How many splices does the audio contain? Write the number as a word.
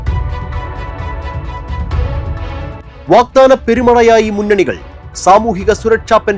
one